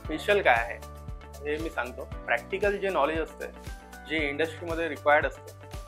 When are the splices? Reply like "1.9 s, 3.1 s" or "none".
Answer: 2.2 s